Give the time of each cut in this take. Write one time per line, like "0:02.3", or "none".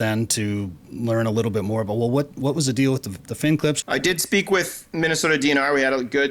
0:03.8